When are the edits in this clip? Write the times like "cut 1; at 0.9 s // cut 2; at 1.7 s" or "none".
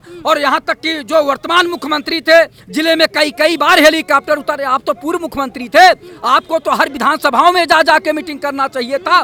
none

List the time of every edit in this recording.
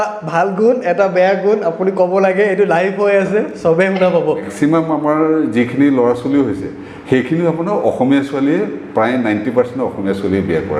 cut 1; at 4.5 s

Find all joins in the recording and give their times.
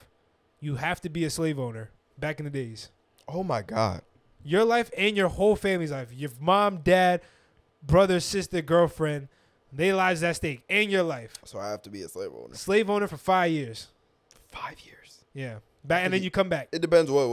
none

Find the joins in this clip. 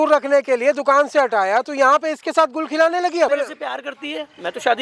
cut 1; at 3.3 s

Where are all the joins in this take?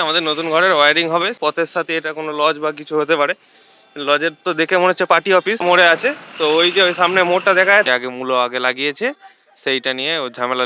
cut 1; at 1.4 s // cut 2; at 5.6 s // cut 3; at 7.9 s

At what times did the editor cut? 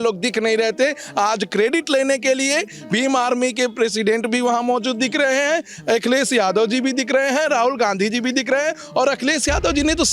none

